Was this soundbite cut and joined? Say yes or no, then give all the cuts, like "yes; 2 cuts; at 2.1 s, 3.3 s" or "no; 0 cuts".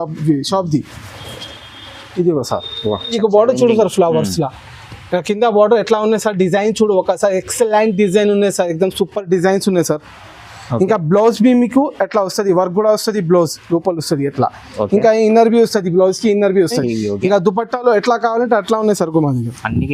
yes; 2 cuts; at 3.1 s, 16.8 s